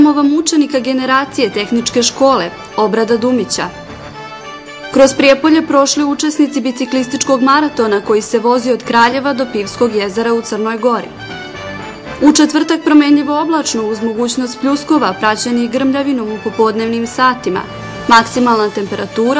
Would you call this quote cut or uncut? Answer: uncut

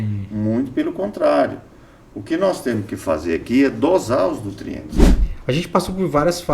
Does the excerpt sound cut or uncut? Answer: cut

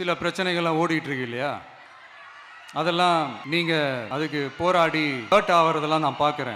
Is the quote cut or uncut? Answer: cut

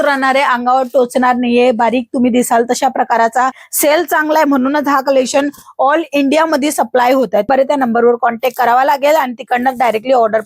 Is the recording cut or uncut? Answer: cut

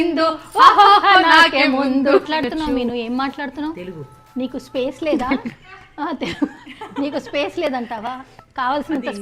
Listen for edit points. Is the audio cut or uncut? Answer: cut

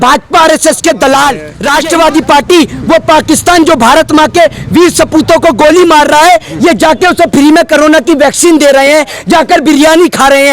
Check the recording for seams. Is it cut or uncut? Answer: cut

